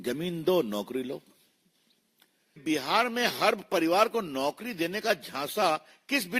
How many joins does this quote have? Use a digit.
1